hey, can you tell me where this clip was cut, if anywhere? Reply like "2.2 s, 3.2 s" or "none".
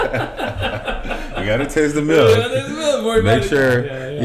none